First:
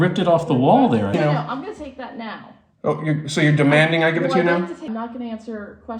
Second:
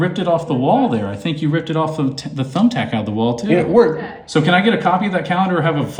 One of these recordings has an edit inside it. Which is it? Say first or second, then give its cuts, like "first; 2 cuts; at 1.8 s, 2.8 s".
first; 2 cuts; at 1.1 s, 4.9 s